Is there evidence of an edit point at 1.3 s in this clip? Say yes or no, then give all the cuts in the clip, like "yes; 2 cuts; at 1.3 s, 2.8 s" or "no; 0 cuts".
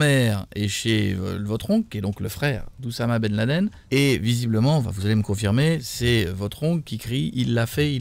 no; 1 cut; at 3.8 s